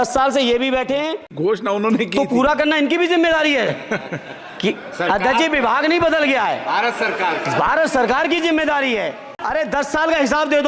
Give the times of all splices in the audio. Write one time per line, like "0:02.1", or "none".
0:01.3
0:09.3